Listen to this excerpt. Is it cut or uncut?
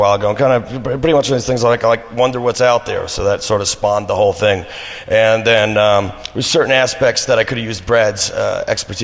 uncut